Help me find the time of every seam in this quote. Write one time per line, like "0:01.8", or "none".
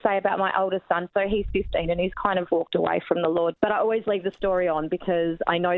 0:03.5